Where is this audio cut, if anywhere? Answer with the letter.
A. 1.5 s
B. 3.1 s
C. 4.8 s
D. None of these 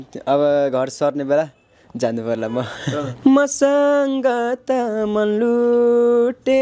B